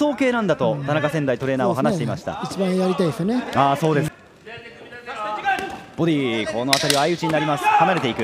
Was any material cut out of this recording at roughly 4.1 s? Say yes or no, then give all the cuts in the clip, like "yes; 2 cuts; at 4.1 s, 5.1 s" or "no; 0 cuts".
yes; 1 cut; at 4.1 s